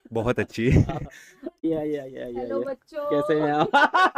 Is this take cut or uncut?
cut